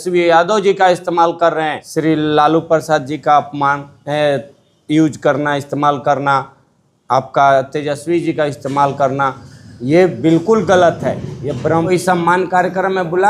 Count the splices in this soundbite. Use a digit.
2